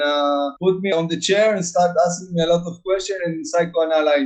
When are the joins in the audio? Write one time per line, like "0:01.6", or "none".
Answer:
none